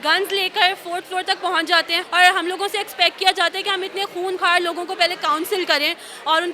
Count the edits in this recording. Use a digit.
1